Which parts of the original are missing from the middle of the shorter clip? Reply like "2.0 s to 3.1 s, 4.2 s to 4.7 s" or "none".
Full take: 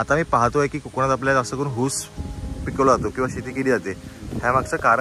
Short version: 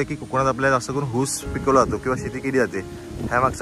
2.1 s to 2.6 s